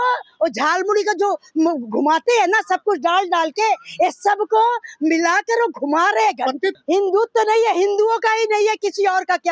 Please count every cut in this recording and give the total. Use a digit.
1